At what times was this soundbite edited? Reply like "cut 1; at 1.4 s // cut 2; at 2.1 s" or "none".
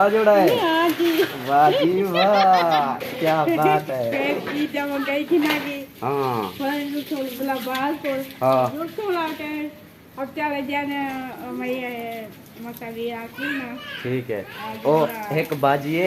none